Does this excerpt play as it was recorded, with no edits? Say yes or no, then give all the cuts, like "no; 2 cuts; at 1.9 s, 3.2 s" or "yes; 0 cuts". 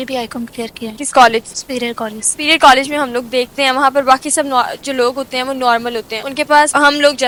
yes; 0 cuts